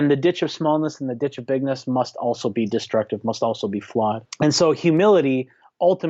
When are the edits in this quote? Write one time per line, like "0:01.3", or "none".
0:04.3